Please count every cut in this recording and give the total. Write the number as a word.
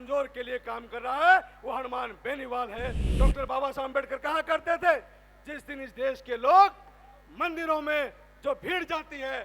one